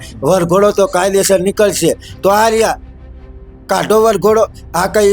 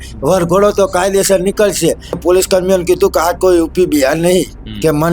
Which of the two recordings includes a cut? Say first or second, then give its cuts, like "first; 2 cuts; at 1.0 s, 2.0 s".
second; 1 cut; at 2.2 s